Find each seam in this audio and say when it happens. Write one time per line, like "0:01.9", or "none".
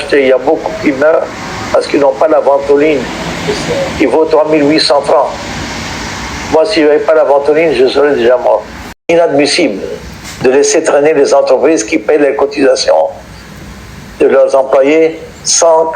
0:09.1